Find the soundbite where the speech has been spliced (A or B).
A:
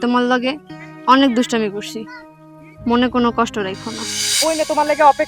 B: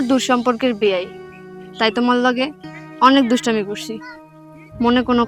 A